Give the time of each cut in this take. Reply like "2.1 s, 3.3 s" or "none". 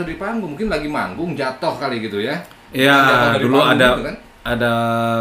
none